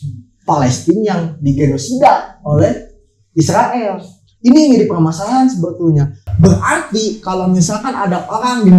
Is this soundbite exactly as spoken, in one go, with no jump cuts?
no; 1 cut; at 6.3 s

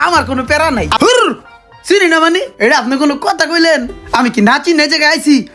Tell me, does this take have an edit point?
yes; 1 cut; at 1.0 s

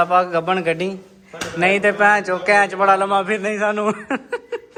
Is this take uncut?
yes; 0 cuts

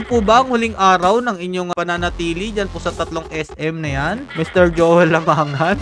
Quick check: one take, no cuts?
no; 2 cuts; at 1.7 s, 4.3 s

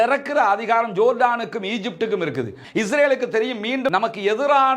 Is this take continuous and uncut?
no; 1 cut; at 2.6 s

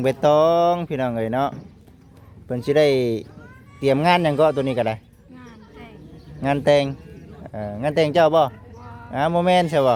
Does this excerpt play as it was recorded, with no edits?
yes; 0 cuts

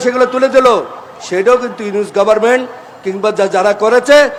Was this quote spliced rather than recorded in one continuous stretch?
no; 0 cuts

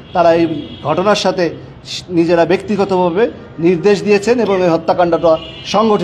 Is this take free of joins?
yes; 0 cuts

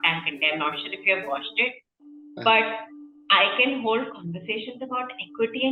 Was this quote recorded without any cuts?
yes; 0 cuts

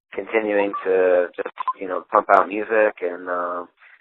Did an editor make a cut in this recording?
yes; 1 cut; at 2.8 s

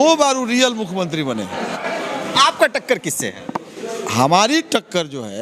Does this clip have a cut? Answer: yes; 1 cut; at 1.7 s

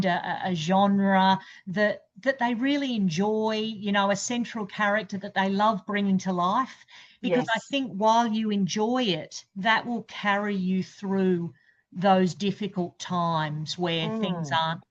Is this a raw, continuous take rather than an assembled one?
yes; 0 cuts

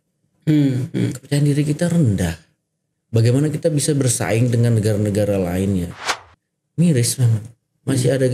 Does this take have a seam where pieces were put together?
yes; 1 cut; at 6.0 s

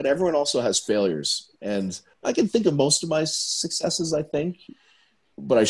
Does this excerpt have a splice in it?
yes; 1 cut; at 2.2 s

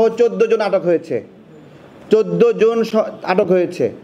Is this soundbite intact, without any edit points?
yes; 0 cuts

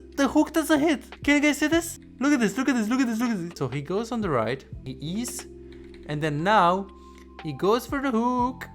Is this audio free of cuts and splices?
no; 4 cuts; at 1.1 s, 2.0 s, 3.5 s, 4.8 s

